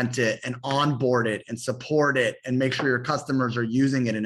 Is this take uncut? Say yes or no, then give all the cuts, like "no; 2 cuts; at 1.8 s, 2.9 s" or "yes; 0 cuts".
yes; 0 cuts